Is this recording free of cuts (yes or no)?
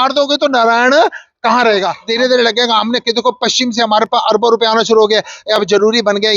no